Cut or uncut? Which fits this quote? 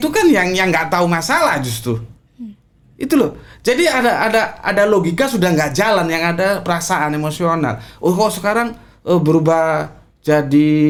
uncut